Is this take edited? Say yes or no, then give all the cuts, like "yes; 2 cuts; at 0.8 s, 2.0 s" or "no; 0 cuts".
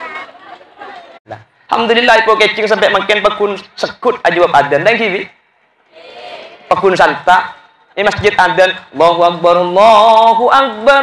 yes; 1 cut; at 1.2 s